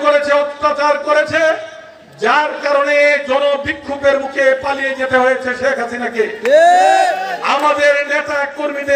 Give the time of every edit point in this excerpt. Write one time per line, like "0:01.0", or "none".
none